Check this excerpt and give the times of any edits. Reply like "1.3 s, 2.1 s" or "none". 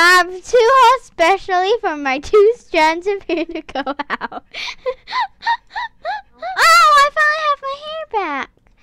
6.5 s